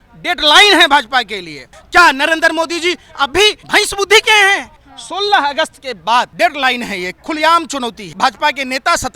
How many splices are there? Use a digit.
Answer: 5